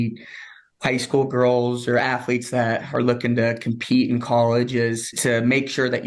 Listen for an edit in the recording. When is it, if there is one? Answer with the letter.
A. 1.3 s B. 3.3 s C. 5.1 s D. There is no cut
C